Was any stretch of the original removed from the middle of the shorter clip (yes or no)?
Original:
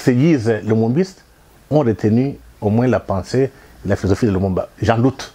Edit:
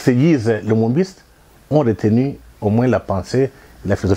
no